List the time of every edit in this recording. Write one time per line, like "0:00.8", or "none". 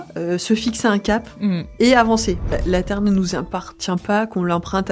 0:02.5

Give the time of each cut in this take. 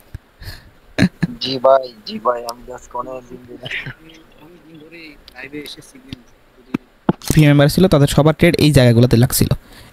0:07.3

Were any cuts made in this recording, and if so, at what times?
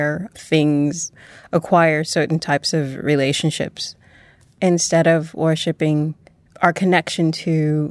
0:01.2
0:04.5

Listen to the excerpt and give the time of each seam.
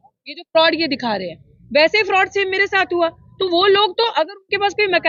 none

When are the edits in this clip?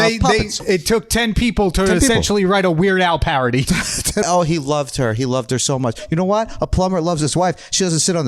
0:04.2

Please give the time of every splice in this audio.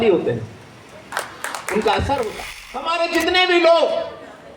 0:03.0

